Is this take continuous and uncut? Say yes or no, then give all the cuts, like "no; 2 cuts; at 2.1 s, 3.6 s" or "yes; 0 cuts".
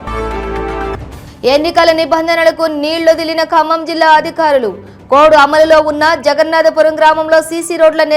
no; 1 cut; at 1.0 s